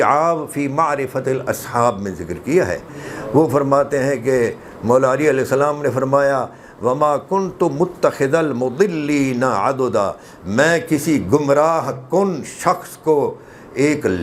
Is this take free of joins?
yes; 0 cuts

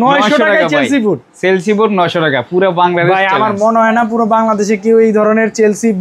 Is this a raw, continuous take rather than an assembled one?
yes; 0 cuts

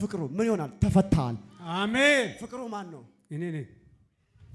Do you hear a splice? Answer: no; 0 cuts

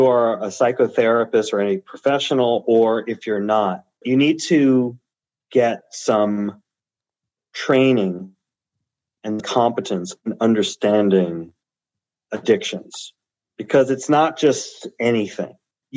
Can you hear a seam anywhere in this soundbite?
yes; 2 cuts; at 4.0 s, 9.4 s

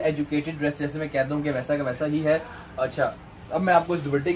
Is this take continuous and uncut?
yes; 0 cuts

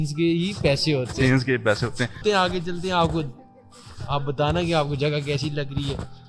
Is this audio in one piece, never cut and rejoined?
no; 1 cut; at 2.2 s

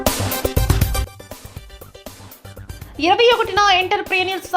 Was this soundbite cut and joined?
yes; 2 cuts; at 1.0 s, 2.6 s

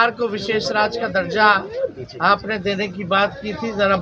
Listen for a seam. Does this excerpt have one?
no; 0 cuts

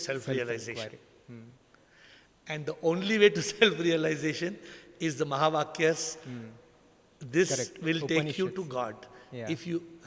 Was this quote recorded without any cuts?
yes; 0 cuts

